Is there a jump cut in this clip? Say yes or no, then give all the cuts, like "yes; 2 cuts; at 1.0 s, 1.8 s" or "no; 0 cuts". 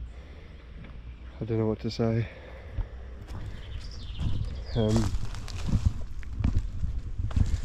no; 0 cuts